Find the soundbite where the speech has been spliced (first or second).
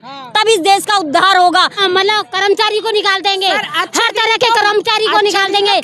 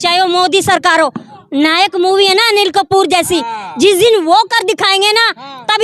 first